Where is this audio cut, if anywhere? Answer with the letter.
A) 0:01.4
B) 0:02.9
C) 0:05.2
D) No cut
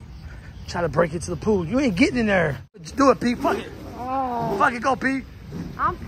B